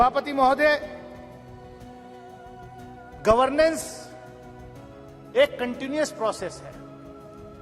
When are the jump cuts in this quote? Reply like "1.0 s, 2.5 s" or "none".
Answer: none

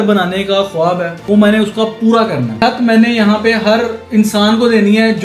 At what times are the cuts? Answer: 1.1 s, 2.5 s, 4.0 s

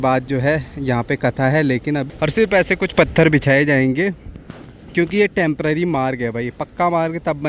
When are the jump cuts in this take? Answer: 2.1 s

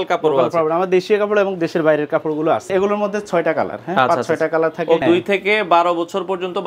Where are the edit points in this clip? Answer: 2.7 s, 5.0 s

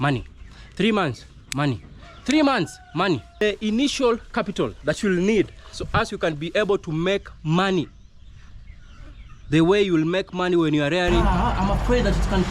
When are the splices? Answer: 3.4 s, 11.2 s

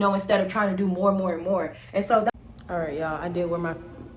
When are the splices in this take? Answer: 2.3 s

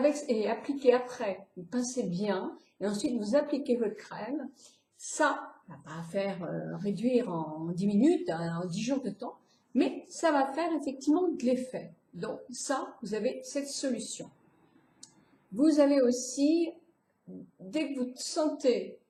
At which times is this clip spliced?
none

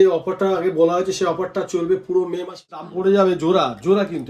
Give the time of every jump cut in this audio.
2.7 s

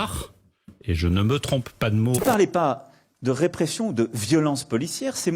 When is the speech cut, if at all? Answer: 2.2 s

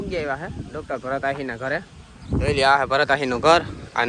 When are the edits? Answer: none

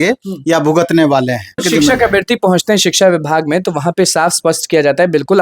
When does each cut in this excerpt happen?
1.6 s

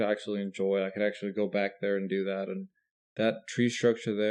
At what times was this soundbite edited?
none

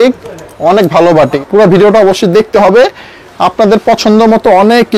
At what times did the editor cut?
1.3 s

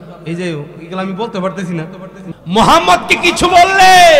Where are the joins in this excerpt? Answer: 2.2 s

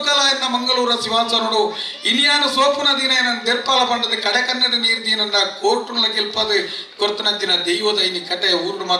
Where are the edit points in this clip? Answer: none

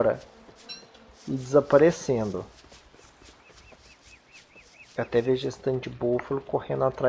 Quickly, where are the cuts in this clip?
1.8 s

